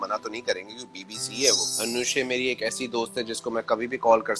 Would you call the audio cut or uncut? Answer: cut